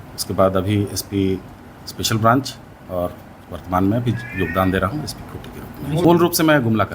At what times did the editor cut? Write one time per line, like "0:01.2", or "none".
0:06.0